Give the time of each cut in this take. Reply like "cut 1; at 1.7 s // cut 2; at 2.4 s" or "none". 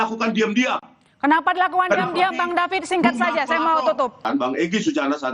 cut 1; at 4.2 s